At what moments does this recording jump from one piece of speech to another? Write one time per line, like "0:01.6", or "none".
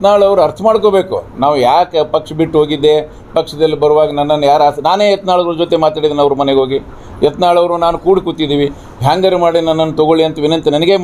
none